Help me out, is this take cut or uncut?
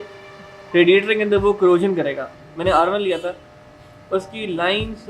cut